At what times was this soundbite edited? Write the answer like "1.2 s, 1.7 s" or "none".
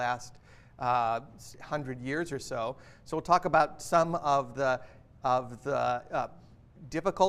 6.4 s